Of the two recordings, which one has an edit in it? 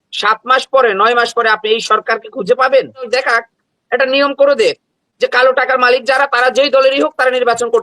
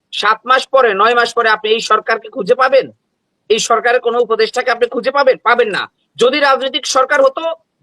first; 1 cut; at 3.1 s

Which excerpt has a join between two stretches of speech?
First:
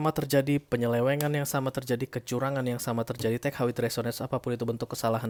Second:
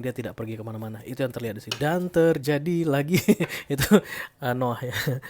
second; 1 cut; at 1.7 s

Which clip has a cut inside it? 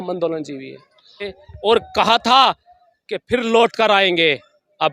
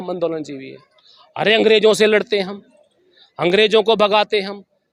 first; 1 cut; at 1.2 s

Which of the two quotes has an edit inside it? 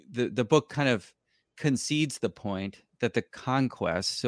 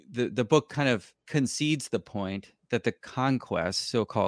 second; 1 cut; at 1.1 s

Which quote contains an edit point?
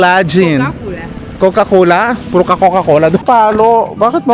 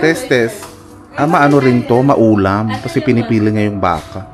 first; 1 cut; at 3.2 s

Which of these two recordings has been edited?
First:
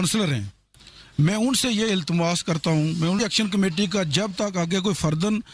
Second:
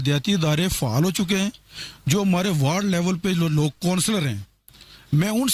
first; 1 cut; at 3.2 s

